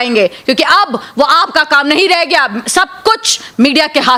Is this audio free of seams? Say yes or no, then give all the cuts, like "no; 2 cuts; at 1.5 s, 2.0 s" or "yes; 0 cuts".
yes; 0 cuts